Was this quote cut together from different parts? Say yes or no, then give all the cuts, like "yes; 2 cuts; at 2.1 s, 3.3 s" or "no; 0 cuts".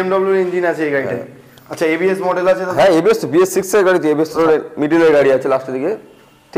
yes; 1 cut; at 4.3 s